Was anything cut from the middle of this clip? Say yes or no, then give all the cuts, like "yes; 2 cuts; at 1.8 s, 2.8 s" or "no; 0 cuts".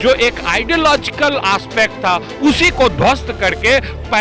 no; 0 cuts